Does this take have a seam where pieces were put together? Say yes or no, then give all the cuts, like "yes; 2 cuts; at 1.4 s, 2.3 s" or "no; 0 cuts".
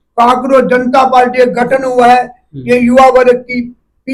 no; 0 cuts